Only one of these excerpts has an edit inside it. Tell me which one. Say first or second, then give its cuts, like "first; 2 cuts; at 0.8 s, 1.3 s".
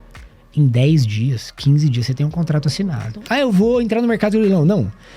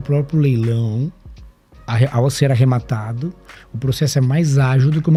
first; 1 cut; at 3.2 s